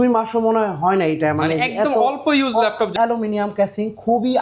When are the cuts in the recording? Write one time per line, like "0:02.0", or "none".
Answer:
0:02.9